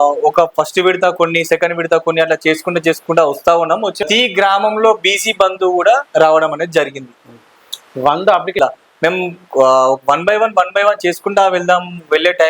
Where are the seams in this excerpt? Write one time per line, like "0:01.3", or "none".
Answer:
0:04.0
0:08.5